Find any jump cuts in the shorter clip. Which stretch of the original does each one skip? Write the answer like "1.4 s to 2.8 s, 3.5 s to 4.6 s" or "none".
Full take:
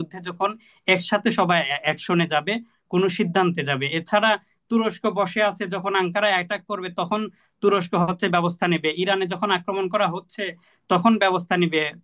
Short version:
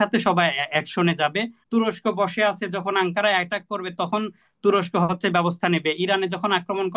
2.7 s to 4.5 s